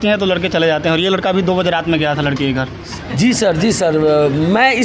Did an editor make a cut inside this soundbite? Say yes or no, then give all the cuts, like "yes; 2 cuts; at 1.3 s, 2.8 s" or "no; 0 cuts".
no; 0 cuts